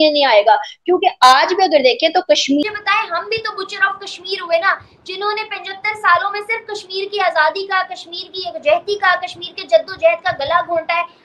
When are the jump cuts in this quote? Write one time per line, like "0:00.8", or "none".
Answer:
0:02.6